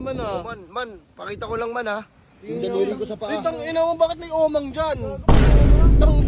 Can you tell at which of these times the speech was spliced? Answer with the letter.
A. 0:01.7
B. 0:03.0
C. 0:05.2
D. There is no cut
D